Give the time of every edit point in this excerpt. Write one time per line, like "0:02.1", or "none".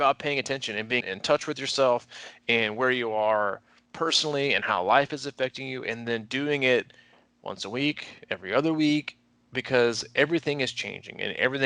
0:01.0